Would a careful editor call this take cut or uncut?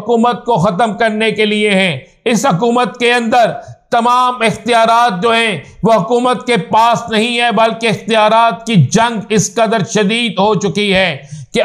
uncut